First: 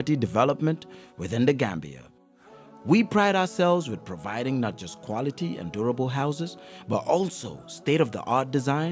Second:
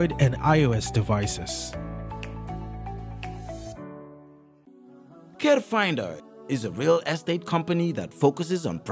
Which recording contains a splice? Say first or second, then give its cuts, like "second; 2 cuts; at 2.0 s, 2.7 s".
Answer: second; 1 cut; at 4.6 s